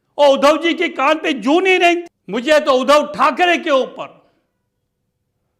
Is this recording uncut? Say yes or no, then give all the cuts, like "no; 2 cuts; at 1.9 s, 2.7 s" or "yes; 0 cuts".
no; 1 cut; at 2.1 s